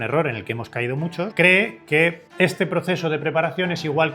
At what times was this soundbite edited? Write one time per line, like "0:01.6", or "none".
0:01.3
0:02.2